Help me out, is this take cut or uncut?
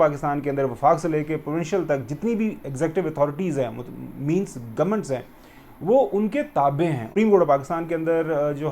cut